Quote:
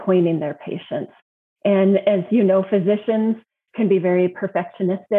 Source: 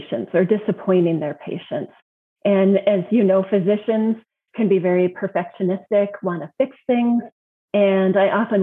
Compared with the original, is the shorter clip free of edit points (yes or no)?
yes